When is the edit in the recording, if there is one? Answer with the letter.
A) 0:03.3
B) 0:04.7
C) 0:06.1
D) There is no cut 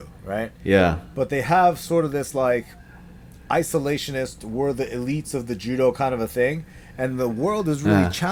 D